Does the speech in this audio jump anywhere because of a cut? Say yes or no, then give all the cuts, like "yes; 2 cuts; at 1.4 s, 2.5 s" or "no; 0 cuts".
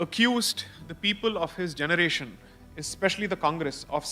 no; 0 cuts